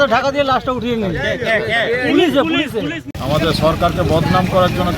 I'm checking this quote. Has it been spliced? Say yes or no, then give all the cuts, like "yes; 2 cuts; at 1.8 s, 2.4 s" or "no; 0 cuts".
yes; 1 cut; at 3.1 s